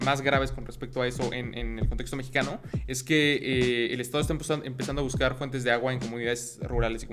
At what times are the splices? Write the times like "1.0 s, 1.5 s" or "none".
none